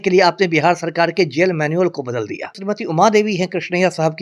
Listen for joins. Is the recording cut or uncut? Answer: cut